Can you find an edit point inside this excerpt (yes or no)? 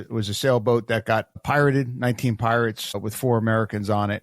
yes